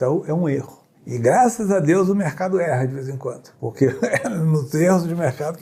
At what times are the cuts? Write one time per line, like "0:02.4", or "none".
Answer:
none